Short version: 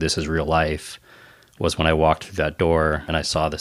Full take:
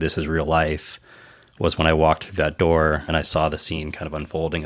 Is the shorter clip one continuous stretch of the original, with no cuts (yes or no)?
yes